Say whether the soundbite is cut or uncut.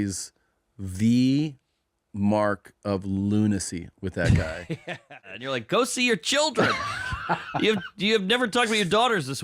cut